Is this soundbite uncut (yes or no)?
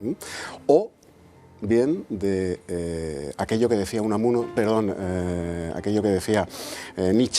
no